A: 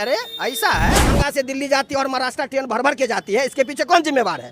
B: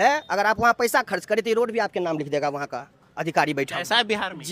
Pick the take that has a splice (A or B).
A